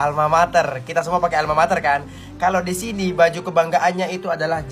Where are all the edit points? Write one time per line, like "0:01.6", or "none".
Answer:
none